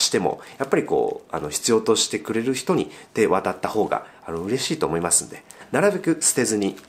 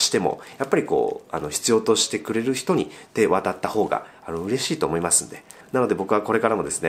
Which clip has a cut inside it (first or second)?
first